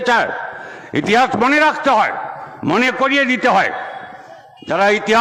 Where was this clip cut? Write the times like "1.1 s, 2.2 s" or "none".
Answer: none